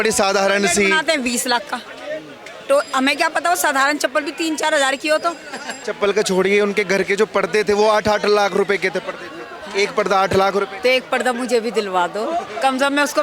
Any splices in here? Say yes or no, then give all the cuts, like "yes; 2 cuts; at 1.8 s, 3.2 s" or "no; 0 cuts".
yes; 1 cut; at 5.8 s